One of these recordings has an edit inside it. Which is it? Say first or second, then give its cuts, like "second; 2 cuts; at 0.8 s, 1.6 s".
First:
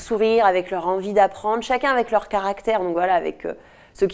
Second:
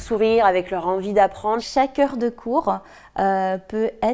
second; 1 cut; at 1.6 s